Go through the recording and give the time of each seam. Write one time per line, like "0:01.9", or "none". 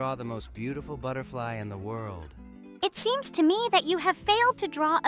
none